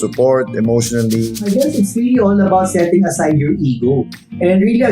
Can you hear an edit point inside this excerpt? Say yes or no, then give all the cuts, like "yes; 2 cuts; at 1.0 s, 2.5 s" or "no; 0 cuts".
yes; 1 cut; at 1.4 s